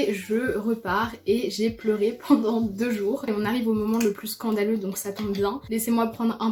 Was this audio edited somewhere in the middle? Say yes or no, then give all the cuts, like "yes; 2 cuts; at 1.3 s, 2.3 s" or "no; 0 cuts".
yes; 1 cut; at 3.3 s